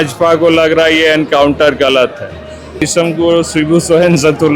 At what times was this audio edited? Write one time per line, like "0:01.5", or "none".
0:02.8